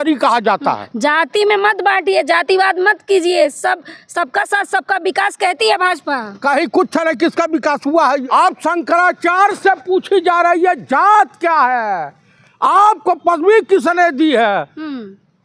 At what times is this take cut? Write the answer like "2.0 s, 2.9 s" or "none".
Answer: 8.1 s